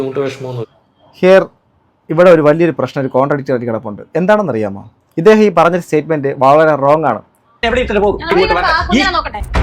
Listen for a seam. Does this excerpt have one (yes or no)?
yes